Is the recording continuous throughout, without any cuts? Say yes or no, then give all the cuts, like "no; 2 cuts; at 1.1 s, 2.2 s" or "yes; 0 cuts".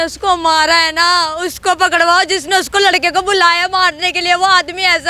yes; 0 cuts